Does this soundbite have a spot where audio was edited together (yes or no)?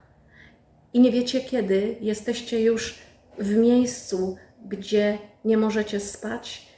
no